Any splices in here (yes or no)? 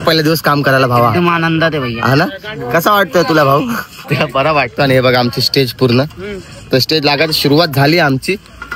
no